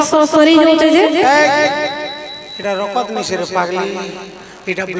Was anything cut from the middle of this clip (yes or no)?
no